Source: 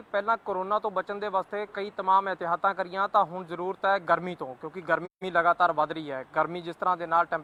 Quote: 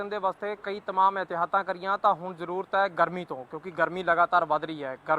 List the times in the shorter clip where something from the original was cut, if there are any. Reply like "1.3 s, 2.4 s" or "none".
4.0 s